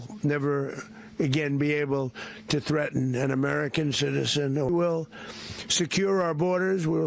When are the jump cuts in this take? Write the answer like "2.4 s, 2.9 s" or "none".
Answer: 4.7 s